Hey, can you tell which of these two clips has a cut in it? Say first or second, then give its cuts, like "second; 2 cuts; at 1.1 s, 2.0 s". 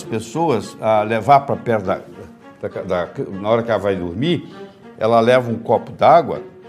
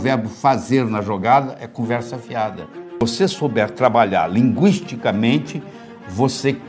second; 1 cut; at 3.1 s